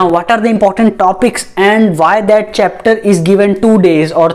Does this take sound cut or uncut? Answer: uncut